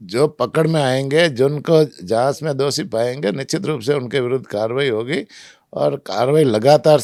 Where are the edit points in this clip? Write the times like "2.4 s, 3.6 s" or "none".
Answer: none

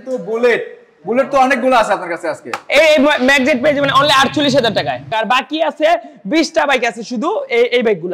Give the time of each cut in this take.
5.1 s

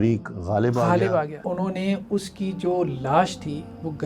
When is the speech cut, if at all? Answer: 1.4 s

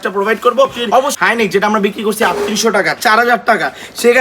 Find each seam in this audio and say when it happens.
1.1 s

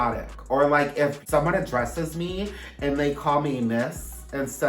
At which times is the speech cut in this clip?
1.2 s

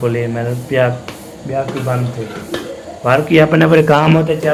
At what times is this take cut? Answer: none

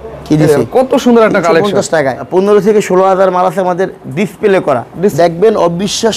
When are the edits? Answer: 2.2 s, 5.1 s

